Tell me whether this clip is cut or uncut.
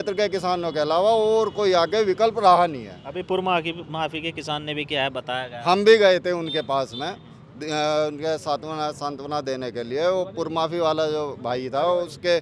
uncut